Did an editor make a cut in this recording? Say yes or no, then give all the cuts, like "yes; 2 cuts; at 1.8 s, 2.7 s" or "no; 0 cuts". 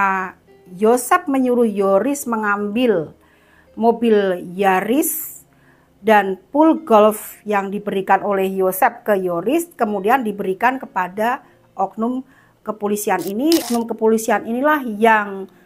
yes; 1 cut; at 13.7 s